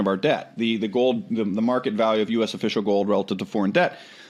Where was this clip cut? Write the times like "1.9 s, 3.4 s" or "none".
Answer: none